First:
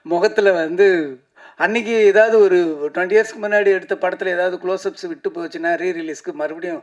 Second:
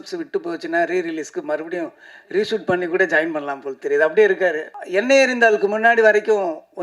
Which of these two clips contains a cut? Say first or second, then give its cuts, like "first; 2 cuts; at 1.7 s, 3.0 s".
second; 1 cut; at 4.8 s